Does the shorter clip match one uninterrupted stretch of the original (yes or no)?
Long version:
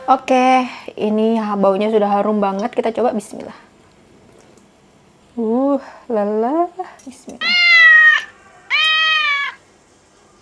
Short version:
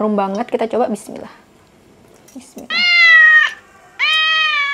no